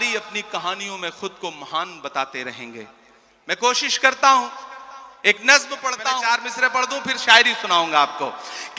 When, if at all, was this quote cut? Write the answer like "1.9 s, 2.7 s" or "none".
6.2 s